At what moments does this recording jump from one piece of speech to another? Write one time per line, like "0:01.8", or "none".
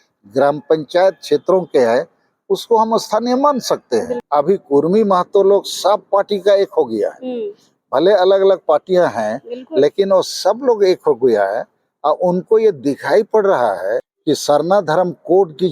0:04.2
0:14.1